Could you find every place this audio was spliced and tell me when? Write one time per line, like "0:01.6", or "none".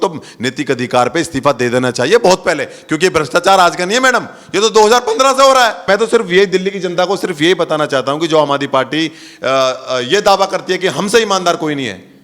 0:05.8